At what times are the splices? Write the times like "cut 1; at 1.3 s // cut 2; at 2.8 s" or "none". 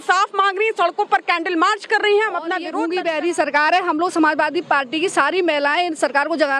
cut 1; at 2.7 s